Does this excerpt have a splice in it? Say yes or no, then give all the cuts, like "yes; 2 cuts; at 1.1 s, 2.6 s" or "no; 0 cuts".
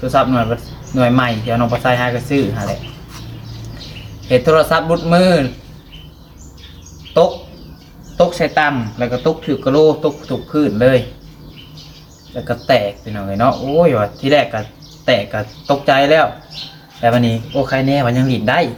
no; 0 cuts